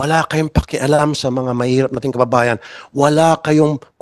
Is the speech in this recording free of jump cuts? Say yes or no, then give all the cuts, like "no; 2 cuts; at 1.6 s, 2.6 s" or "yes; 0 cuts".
yes; 0 cuts